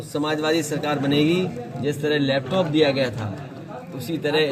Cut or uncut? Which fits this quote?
uncut